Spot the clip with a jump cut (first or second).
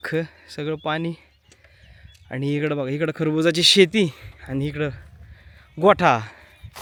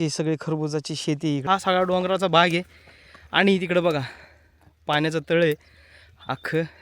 second